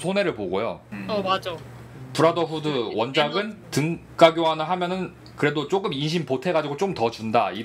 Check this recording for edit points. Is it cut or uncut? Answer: cut